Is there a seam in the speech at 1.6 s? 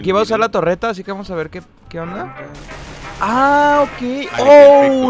no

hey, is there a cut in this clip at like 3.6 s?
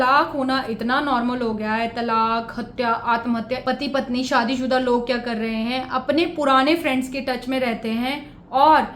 yes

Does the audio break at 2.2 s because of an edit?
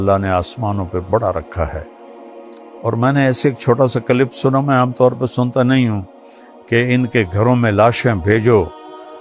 yes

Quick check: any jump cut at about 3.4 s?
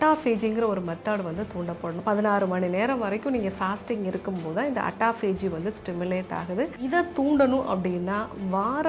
no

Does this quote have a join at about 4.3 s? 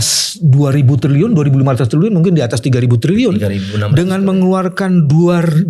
no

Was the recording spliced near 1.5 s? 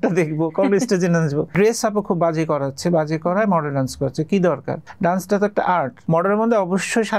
yes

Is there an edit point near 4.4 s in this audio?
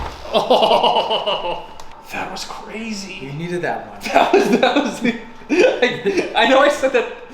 no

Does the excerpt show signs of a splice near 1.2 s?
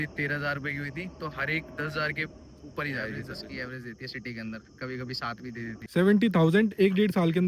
no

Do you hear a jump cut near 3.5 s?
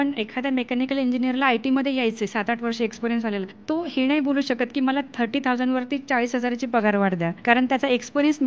yes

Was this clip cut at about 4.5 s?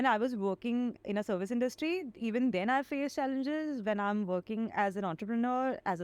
no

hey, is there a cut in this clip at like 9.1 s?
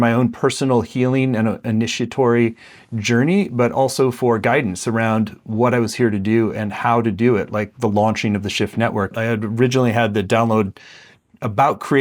yes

